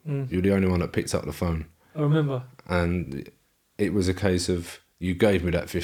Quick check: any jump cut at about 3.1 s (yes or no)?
no